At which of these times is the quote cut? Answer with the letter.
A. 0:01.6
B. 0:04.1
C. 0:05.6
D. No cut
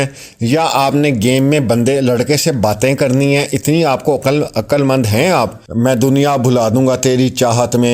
C